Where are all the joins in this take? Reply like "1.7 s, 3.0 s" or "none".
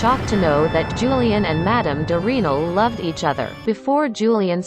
3.6 s